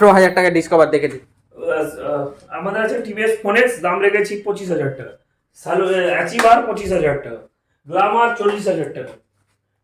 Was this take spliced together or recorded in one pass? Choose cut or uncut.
uncut